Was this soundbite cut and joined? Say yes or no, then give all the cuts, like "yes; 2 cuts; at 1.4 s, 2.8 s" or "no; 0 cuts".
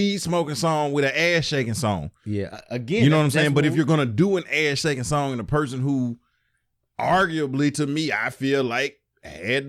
no; 0 cuts